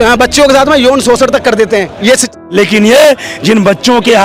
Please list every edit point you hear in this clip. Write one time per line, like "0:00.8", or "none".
0:02.3